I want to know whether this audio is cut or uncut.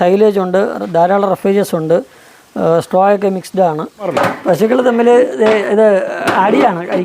cut